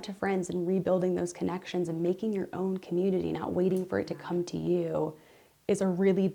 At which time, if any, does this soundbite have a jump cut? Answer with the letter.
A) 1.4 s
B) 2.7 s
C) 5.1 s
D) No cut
D